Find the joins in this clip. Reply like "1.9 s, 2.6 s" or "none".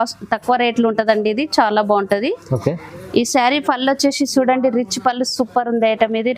none